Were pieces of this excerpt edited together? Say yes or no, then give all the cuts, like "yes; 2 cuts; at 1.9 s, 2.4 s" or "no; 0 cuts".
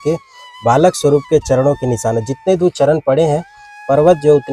no; 0 cuts